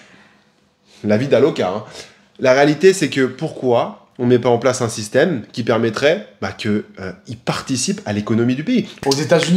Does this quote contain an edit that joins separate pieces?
no; 0 cuts

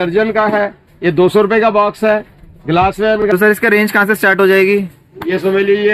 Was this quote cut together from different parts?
yes; 1 cut; at 3.2 s

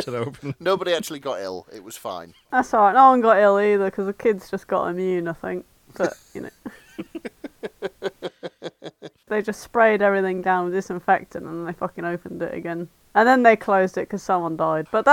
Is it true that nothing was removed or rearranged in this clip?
no; 3 cuts; at 2.3 s, 8.8 s, 13.0 s

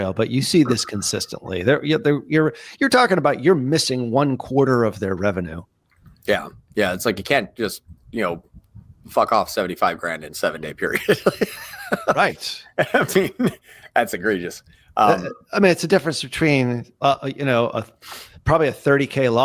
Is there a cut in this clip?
no; 0 cuts

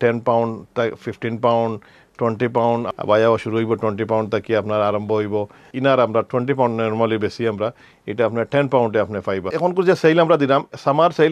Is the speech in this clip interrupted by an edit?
yes; 3 cuts; at 2.9 s, 5.7 s, 9.5 s

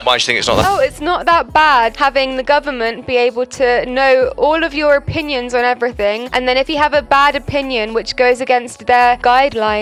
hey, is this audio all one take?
yes; 0 cuts

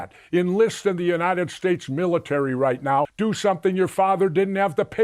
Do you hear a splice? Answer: yes; 1 cut; at 3.1 s

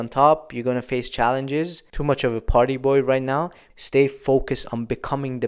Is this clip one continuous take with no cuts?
no; 2 cuts; at 1.8 s, 3.6 s

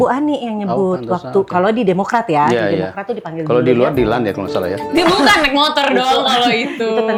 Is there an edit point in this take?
no; 0 cuts

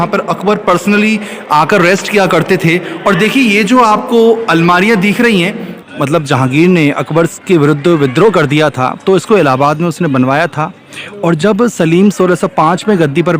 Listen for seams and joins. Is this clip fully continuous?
no; 1 cut; at 5.8 s

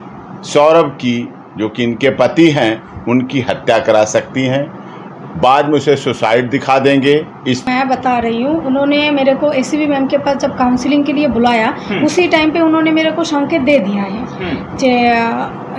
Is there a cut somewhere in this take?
yes; 1 cut; at 7.7 s

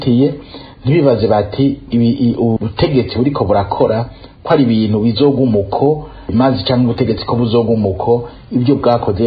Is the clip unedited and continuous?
yes; 0 cuts

